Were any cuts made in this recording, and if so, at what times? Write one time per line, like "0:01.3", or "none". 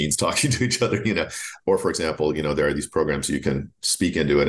0:01.5